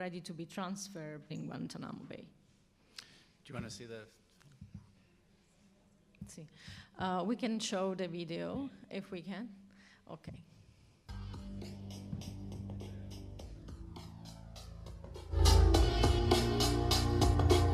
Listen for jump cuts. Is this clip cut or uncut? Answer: uncut